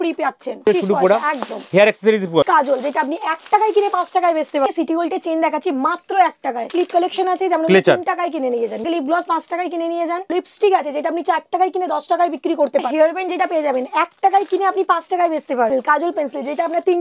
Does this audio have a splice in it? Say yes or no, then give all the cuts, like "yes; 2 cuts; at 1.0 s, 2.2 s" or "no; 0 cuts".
yes; 8 cuts; at 0.7 s, 2.4 s, 4.7 s, 6.7 s, 8.8 s, 10.3 s, 12.9 s, 15.7 s